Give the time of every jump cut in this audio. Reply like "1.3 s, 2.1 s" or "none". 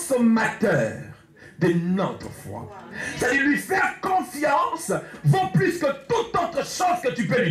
none